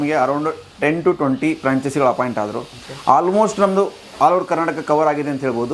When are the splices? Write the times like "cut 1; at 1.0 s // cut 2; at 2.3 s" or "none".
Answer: none